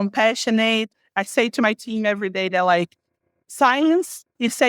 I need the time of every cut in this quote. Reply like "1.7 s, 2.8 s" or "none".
1.0 s